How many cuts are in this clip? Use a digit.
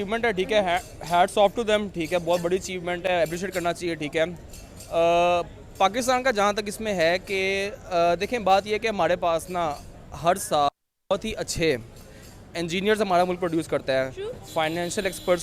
0